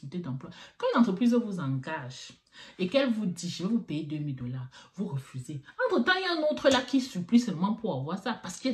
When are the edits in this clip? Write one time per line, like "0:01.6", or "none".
none